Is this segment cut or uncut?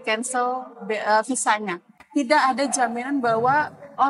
cut